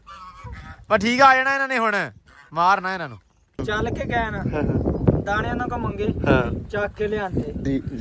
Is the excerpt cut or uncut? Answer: cut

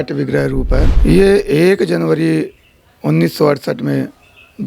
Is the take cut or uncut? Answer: cut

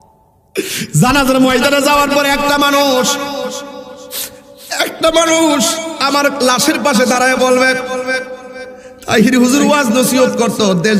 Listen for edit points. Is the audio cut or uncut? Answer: uncut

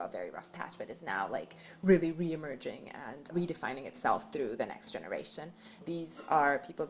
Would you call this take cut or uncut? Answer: cut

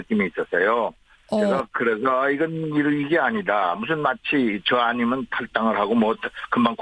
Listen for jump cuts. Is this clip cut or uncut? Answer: uncut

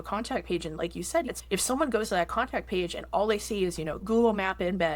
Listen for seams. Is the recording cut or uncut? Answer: cut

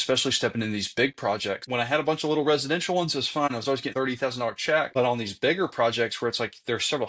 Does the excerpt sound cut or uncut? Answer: cut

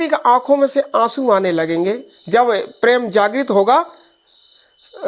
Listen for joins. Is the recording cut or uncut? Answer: cut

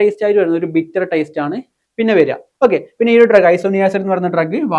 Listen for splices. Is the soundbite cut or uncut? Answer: uncut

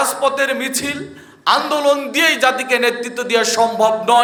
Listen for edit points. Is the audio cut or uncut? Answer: uncut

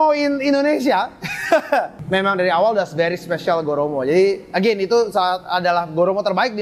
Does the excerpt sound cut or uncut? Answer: cut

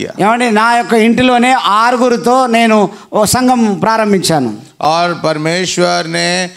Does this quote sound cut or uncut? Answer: cut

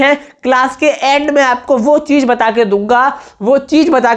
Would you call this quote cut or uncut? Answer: uncut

